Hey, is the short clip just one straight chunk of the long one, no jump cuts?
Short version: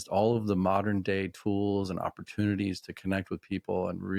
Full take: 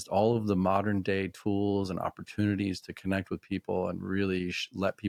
yes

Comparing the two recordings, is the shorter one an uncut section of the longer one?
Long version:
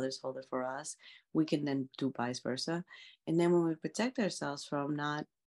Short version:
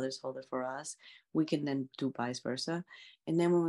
yes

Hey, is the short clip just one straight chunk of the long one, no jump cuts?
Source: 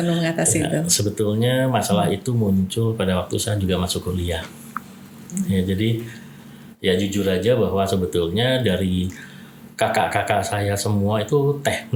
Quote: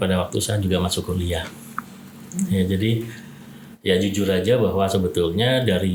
yes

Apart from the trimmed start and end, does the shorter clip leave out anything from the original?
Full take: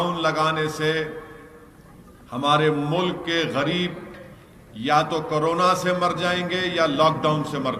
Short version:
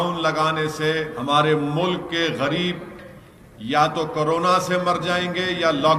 yes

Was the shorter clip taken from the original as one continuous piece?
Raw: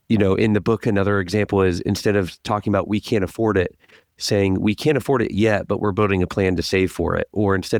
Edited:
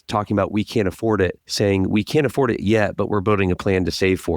no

